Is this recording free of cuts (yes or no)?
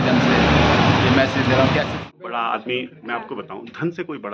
no